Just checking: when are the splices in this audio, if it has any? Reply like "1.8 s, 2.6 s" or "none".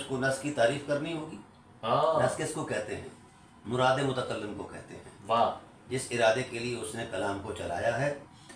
none